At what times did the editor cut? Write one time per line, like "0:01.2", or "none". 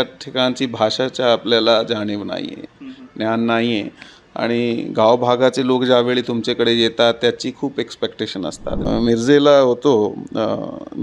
0:08.8

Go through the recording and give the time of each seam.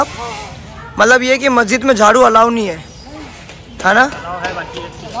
none

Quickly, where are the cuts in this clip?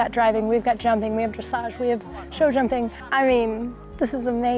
0:03.0

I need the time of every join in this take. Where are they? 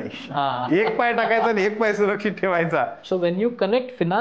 0:03.0

